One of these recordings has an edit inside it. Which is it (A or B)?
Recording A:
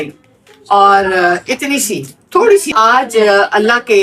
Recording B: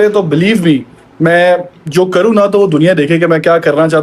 A